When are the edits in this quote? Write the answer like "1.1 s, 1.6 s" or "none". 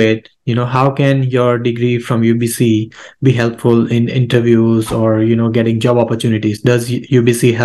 none